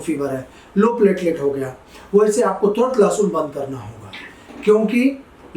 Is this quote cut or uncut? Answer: uncut